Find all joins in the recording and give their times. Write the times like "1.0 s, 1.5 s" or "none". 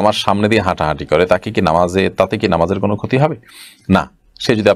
none